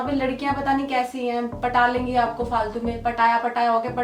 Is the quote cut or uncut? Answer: uncut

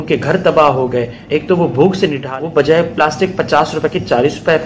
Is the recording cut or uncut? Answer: cut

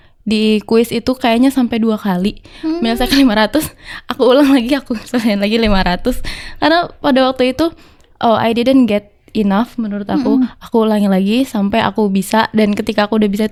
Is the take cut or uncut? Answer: uncut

